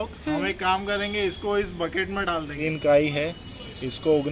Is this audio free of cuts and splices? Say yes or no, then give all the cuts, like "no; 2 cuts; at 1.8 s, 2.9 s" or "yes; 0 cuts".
no; 1 cut; at 2.6 s